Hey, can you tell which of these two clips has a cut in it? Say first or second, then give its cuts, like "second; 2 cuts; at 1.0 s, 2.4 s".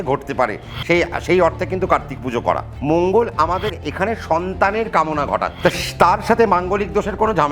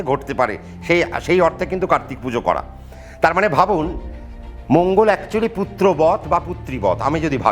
first; 2 cuts; at 2.7 s, 5.5 s